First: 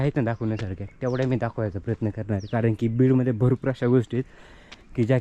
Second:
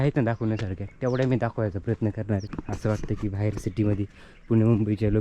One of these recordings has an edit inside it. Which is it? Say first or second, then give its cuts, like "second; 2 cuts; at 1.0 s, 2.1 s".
second; 1 cut; at 2.4 s